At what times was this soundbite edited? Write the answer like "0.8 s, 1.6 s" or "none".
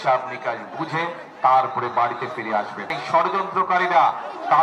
2.9 s